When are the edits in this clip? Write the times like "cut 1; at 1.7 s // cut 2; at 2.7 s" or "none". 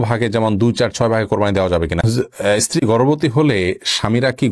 cut 1; at 2.0 s